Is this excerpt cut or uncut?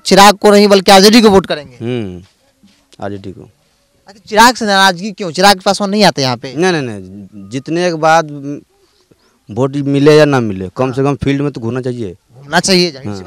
uncut